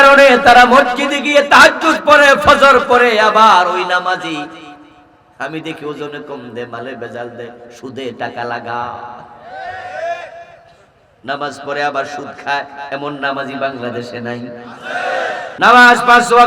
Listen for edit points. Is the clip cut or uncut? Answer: cut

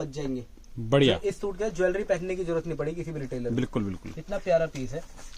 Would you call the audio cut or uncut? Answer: uncut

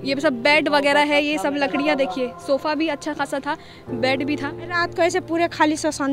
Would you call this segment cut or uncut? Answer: cut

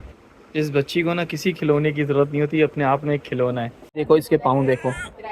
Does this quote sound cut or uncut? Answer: cut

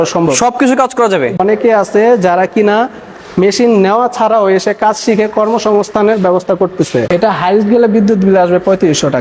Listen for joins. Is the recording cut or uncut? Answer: cut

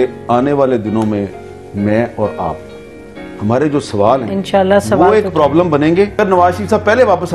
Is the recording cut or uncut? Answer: cut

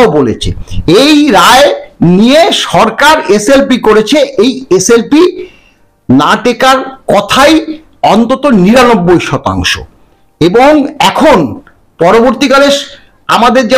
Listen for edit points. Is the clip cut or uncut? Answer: uncut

